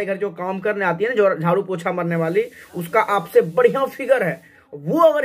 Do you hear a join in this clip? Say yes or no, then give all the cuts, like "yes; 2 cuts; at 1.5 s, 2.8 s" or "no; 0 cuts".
no; 0 cuts